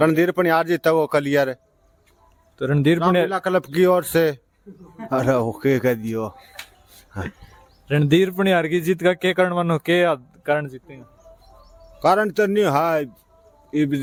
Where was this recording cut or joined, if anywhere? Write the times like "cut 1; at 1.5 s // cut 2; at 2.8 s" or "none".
none